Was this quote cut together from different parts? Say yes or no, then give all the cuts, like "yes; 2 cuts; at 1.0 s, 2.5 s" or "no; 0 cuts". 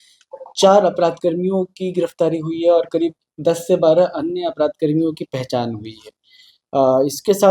no; 0 cuts